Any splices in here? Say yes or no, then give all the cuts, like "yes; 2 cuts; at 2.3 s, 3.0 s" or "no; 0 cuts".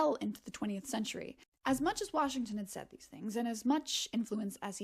yes; 1 cut; at 1.5 s